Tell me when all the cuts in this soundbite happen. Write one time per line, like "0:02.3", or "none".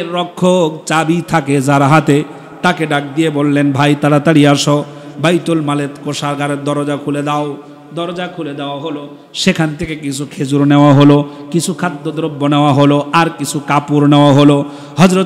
none